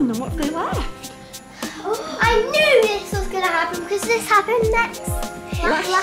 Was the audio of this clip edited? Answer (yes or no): no